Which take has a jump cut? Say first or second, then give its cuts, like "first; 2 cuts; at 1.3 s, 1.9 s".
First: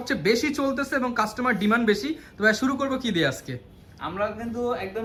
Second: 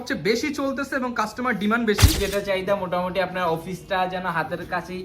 second; 1 cut; at 2.2 s